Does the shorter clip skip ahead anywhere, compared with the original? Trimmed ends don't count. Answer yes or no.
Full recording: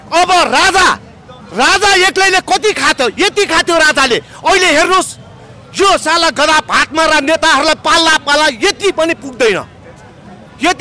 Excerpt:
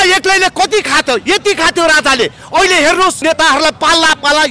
yes